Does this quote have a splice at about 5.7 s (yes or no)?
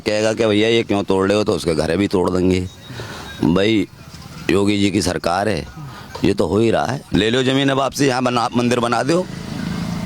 no